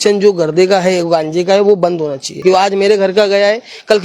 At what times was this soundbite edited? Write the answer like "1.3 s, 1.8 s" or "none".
2.3 s